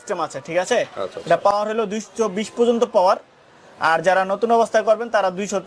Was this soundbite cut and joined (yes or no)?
no